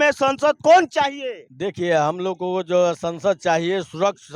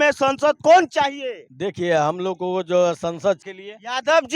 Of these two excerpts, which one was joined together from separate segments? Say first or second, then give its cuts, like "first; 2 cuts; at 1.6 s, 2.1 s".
second; 1 cut; at 3.4 s